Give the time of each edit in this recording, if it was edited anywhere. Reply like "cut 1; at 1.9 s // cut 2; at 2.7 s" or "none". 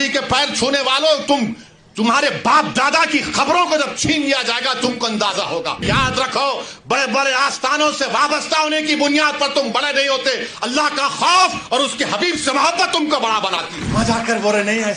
cut 1; at 5.8 s // cut 2; at 13.8 s

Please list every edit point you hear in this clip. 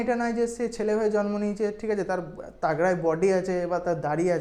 none

